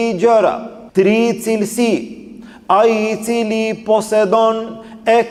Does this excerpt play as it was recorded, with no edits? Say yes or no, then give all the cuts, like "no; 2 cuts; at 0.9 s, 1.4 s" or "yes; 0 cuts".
yes; 0 cuts